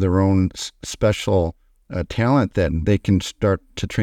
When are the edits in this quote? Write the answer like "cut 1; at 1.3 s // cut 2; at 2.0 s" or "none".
none